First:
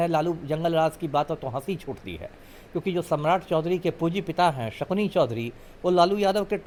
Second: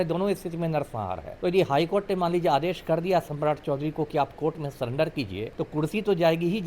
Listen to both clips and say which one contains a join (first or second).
second